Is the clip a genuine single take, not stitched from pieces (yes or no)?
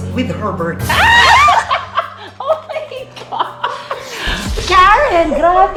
yes